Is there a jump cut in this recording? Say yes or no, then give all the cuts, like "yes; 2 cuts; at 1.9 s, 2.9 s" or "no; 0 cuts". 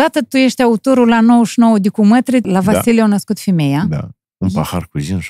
yes; 2 cuts; at 2.4 s, 4.2 s